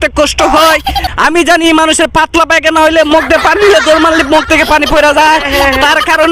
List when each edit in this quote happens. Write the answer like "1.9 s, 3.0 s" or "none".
1.0 s